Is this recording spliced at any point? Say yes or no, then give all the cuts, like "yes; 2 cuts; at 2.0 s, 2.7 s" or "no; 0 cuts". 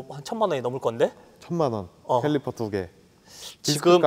no; 0 cuts